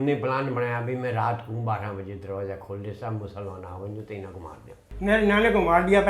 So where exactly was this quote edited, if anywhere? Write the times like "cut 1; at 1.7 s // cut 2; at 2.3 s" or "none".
cut 1; at 4.9 s